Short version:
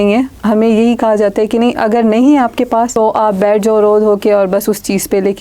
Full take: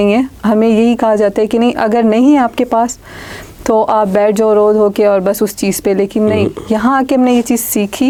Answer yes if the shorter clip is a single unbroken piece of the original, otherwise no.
no